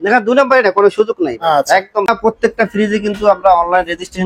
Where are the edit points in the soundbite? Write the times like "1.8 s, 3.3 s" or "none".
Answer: 2.1 s